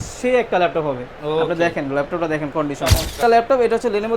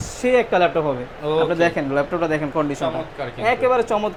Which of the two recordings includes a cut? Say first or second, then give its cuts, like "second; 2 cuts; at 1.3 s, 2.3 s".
first; 1 cut; at 3.2 s